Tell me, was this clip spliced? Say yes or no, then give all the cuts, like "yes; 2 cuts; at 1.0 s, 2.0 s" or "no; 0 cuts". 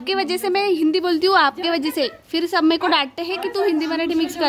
no; 0 cuts